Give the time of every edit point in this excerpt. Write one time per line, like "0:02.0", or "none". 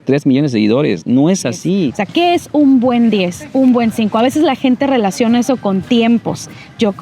0:02.0